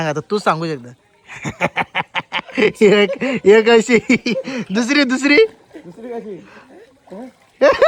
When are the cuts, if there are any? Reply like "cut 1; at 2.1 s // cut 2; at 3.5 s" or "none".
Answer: none